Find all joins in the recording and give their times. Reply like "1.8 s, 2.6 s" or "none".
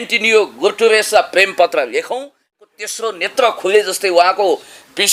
2.5 s